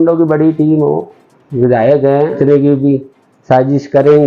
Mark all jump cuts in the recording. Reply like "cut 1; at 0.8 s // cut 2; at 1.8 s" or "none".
cut 1; at 2.4 s

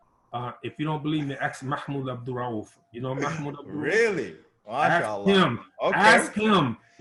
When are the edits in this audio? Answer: none

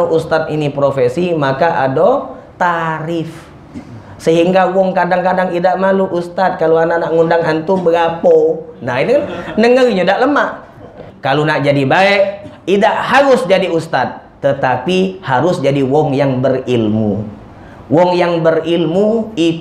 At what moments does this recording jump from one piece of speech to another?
cut 1; at 11.0 s

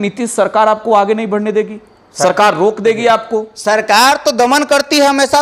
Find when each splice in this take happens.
none

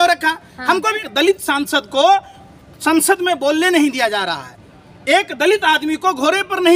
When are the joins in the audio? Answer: cut 1; at 1.0 s

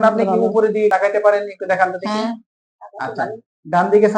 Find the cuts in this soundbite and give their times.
cut 1; at 0.9 s

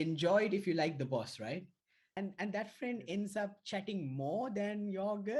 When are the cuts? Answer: cut 1; at 2.1 s

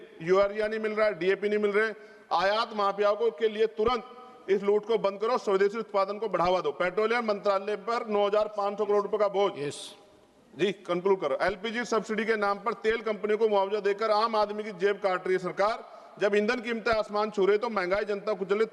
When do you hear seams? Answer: none

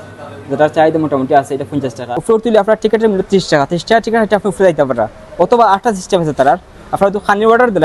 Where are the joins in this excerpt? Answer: cut 1; at 2.2 s

